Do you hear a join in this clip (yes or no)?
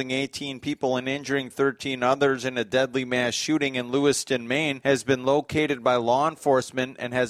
yes